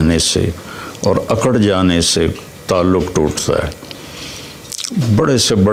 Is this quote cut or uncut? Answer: uncut